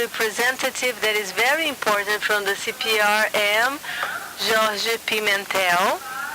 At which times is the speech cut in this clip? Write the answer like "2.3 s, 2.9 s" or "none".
1.9 s